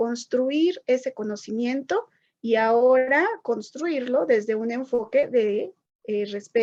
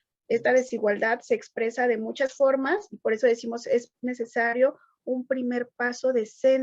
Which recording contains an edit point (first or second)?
second